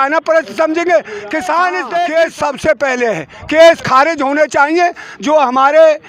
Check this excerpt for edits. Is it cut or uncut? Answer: cut